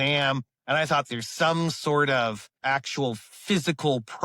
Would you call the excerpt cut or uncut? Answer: cut